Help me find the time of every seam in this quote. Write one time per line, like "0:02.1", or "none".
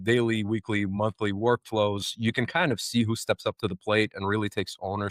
none